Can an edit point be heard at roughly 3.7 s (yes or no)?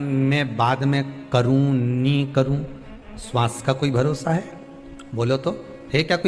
no